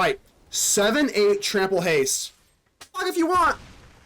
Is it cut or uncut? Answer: cut